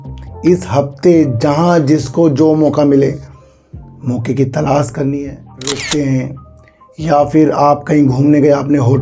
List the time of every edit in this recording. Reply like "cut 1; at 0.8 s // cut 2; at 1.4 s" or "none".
cut 1; at 5.8 s